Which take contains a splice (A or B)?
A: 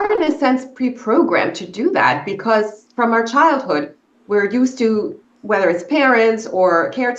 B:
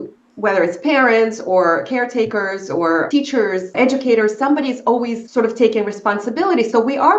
B